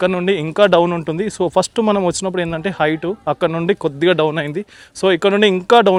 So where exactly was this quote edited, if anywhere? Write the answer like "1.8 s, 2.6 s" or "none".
none